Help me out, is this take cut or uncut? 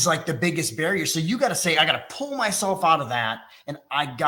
uncut